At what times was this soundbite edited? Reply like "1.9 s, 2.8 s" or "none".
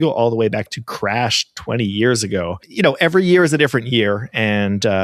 2.6 s